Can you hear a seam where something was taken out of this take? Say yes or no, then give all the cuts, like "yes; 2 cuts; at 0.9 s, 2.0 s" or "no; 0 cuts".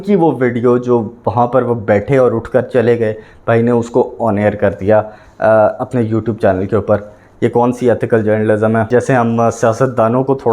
yes; 1 cut; at 8.9 s